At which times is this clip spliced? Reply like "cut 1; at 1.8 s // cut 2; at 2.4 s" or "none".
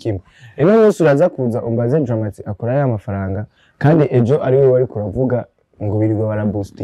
none